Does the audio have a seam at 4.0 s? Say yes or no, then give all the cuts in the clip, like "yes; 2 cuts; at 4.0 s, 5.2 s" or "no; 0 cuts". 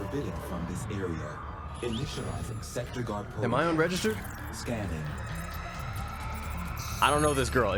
no; 0 cuts